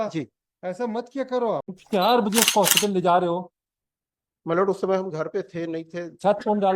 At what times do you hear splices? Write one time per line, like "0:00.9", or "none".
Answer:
0:01.8